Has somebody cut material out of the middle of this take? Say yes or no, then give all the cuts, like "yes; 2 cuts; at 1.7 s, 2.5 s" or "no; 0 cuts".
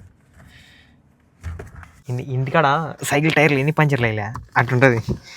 yes; 1 cut; at 2.0 s